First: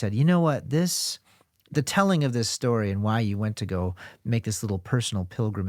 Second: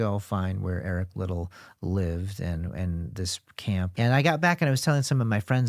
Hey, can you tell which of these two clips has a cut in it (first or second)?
second